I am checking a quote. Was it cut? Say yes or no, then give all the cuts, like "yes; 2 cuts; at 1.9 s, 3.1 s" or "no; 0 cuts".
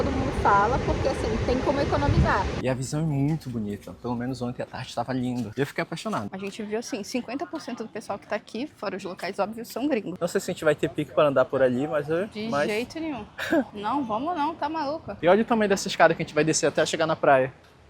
yes; 4 cuts; at 2.6 s, 6.3 s, 10.1 s, 15.1 s